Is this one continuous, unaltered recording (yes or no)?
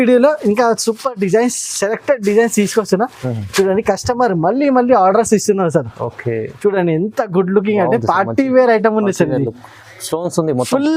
yes